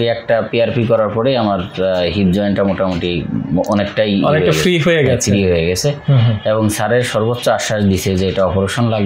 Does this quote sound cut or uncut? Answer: uncut